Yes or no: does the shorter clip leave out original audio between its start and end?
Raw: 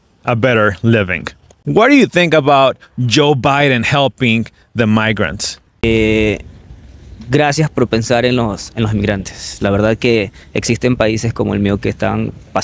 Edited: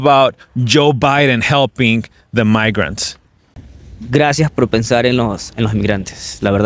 yes